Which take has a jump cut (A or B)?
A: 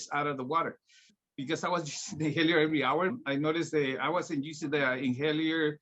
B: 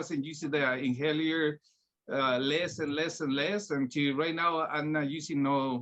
A